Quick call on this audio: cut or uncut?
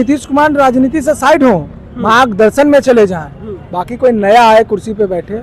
uncut